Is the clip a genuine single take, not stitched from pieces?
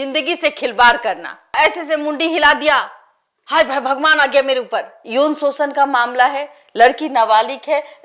no; 2 cuts; at 1.5 s, 5.0 s

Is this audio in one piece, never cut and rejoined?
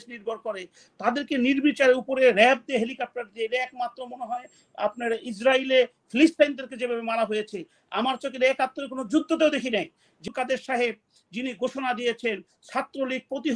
no; 1 cut; at 10.2 s

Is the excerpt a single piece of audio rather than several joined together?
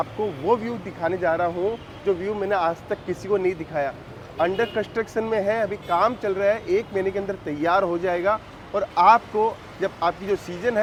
yes; 0 cuts

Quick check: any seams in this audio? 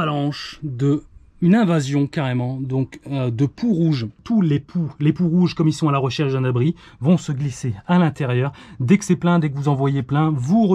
yes; 1 cut; at 4.2 s

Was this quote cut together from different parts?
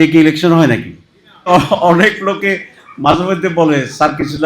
yes; 1 cut; at 1.5 s

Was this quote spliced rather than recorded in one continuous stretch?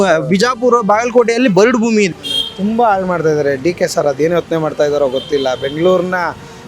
yes; 1 cut; at 2.2 s

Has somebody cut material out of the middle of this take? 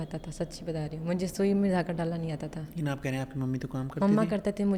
no; 0 cuts

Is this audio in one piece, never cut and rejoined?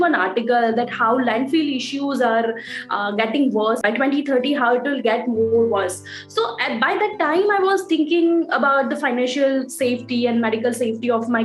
no; 1 cut; at 3.8 s

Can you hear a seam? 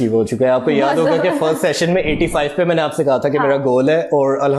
no; 0 cuts

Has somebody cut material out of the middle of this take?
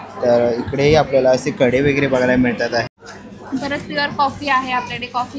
yes; 1 cut; at 3.0 s

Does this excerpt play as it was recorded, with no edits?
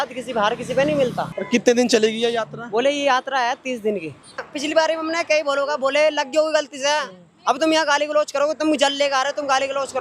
no; 2 cuts; at 1.4 s, 4.4 s

